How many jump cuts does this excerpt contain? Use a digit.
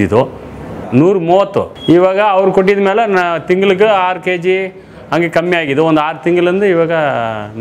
2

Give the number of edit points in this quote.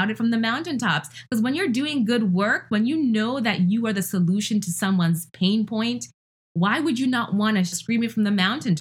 1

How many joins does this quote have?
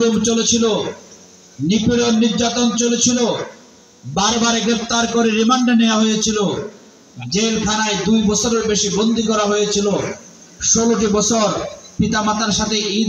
0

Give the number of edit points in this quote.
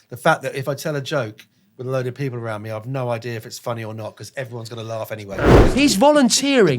1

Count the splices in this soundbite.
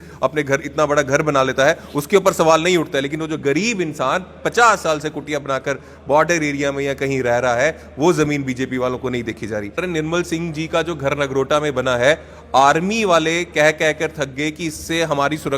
1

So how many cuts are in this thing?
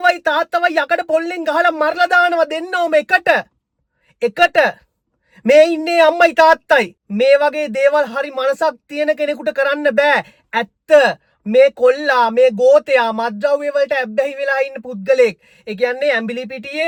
0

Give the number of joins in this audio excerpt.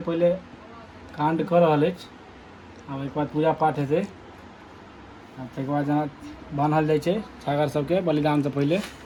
0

